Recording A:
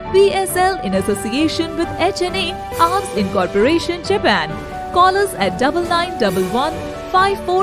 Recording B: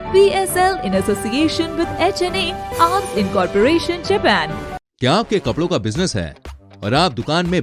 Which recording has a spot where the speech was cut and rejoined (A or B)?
B